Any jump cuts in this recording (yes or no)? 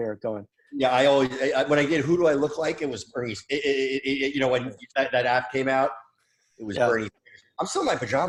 no